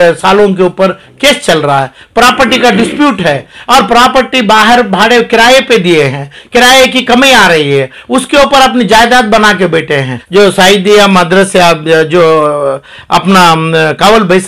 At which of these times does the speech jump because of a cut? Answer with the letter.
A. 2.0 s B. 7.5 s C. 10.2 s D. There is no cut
C